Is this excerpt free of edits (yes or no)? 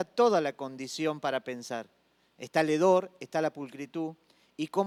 yes